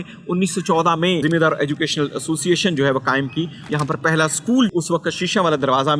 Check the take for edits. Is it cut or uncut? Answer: cut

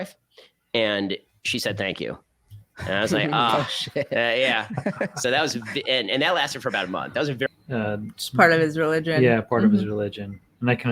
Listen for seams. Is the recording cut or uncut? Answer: cut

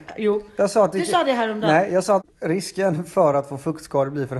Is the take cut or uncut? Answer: cut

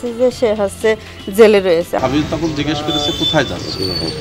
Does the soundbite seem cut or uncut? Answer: cut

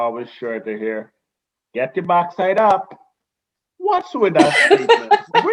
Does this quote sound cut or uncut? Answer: uncut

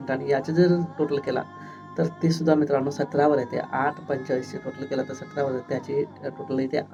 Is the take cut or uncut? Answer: uncut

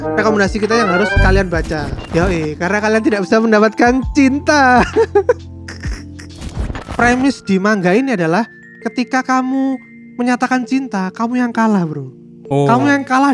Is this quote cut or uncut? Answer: cut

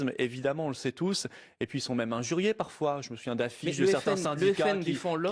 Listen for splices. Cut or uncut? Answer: uncut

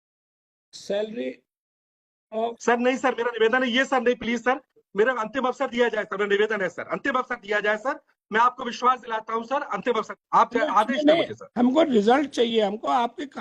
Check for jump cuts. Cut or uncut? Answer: cut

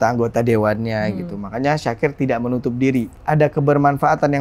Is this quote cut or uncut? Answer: cut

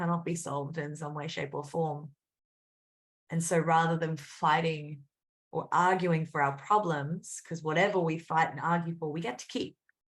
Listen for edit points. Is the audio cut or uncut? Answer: uncut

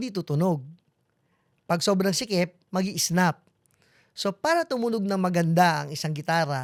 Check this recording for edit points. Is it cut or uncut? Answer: uncut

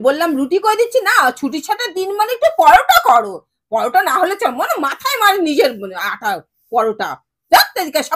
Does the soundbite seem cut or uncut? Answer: uncut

